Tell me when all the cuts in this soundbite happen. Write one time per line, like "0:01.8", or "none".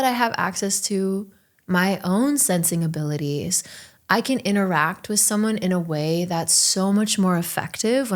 none